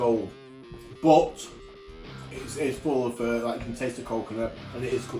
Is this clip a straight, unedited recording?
yes; 0 cuts

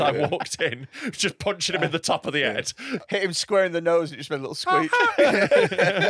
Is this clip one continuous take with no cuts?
no; 1 cut; at 2.9 s

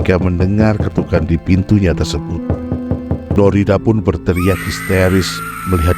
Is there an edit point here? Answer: yes; 1 cut; at 3.3 s

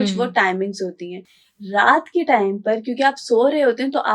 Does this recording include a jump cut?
no; 0 cuts

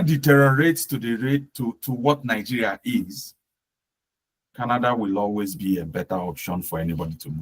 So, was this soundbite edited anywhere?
no; 0 cuts

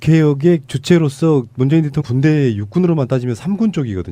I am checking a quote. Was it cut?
no; 0 cuts

